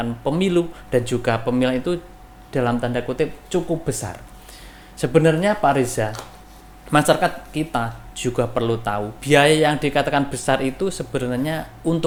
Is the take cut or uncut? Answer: uncut